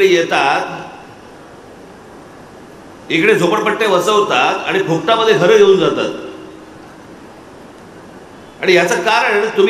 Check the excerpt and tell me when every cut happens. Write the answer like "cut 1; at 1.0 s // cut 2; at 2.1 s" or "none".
cut 1; at 7.0 s